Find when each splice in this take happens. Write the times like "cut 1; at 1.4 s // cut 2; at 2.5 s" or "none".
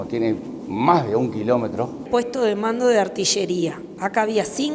cut 1; at 2.1 s